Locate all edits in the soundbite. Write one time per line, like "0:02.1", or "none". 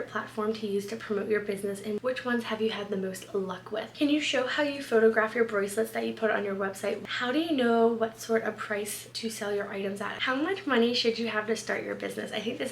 0:04.0
0:07.1
0:10.2